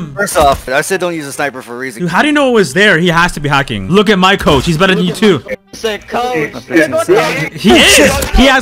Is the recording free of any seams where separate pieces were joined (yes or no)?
no